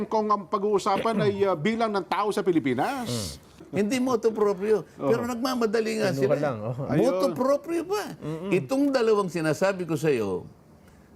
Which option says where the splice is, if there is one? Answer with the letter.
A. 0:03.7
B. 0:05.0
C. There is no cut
A